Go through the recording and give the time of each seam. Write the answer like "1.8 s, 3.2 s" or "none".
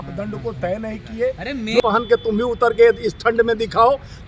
1.8 s